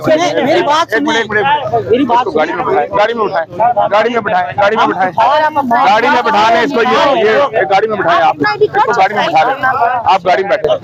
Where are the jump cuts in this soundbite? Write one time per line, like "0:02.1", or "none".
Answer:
none